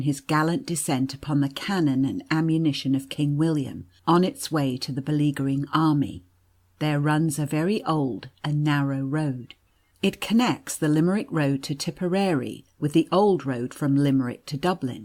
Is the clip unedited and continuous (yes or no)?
no